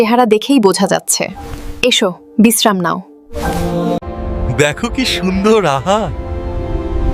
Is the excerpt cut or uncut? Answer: cut